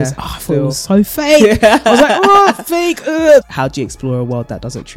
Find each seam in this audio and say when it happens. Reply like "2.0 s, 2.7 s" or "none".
3.4 s

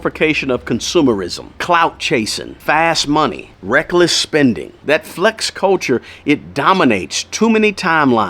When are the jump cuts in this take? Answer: 3.5 s, 4.8 s

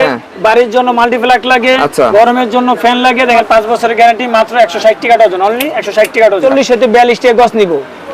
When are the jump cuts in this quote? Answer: 3.4 s, 6.4 s

